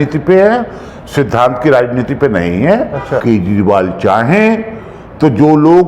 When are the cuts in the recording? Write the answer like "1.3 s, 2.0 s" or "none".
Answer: 3.2 s